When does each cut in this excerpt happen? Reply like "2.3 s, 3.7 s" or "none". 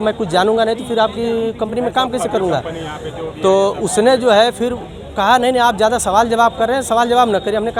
none

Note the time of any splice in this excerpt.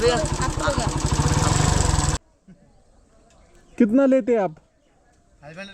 2.1 s

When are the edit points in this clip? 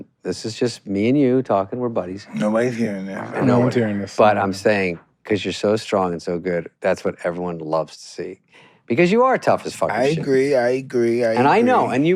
none

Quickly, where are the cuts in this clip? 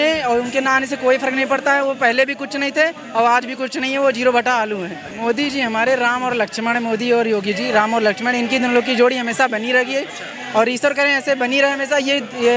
none

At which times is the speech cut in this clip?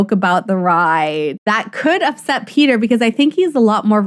1.4 s

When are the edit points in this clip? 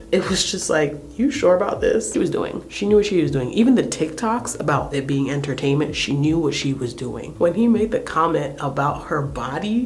2.1 s, 7.3 s

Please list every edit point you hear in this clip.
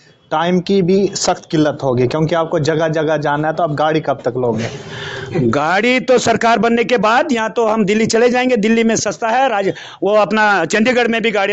none

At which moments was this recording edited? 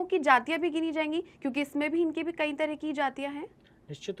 none

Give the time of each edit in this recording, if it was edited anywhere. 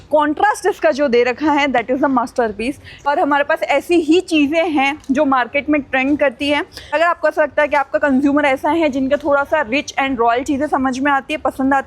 3.1 s, 6.9 s

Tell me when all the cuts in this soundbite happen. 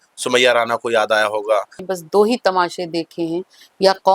1.8 s

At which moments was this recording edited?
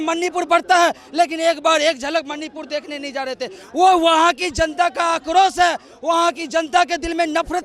none

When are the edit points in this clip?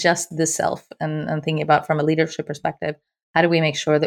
none

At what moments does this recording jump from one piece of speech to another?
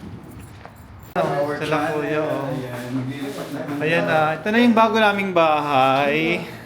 1.2 s

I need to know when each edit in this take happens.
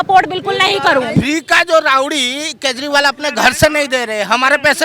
1.1 s

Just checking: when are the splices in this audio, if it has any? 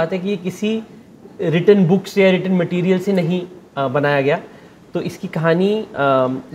none

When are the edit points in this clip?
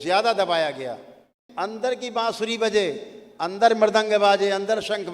1.4 s

